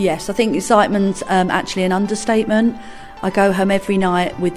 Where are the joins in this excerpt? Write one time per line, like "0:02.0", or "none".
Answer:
none